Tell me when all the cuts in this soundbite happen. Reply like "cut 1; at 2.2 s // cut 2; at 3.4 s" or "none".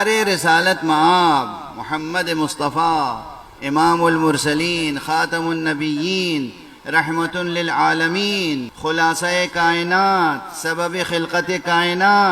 cut 1; at 8.7 s